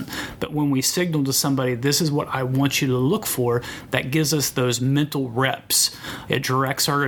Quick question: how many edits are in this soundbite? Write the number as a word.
one